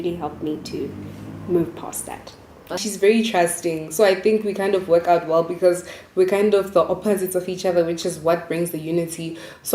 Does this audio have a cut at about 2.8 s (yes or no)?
yes